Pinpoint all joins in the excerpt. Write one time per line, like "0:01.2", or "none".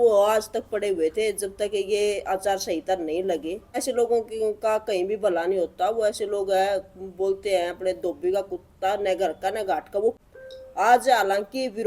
0:03.7
0:10.1